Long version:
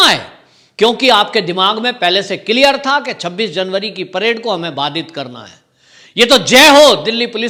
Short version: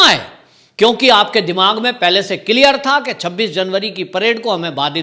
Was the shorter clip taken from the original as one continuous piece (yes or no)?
yes